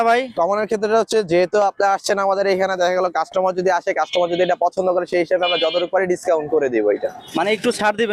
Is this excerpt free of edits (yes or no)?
yes